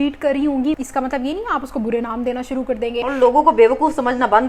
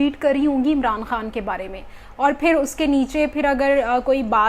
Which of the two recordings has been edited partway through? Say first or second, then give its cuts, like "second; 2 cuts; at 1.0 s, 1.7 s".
first; 2 cuts; at 0.8 s, 3.0 s